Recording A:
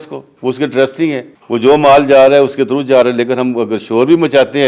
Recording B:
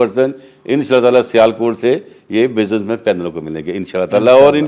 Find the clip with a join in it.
A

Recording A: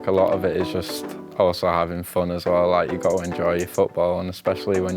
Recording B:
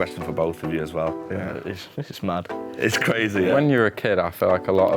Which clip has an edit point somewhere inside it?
B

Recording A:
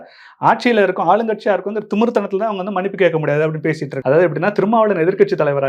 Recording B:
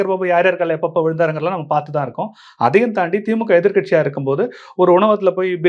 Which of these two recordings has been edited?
A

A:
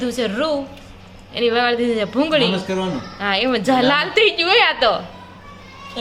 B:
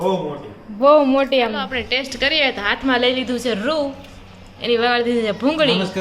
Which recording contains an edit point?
B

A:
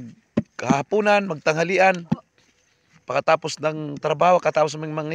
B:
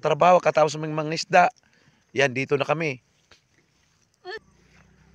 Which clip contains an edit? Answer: B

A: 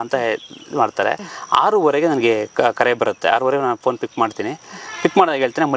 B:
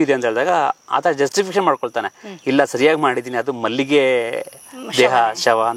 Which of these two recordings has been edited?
A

